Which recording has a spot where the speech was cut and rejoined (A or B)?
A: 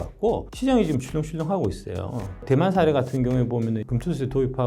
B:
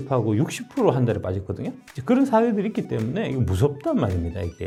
A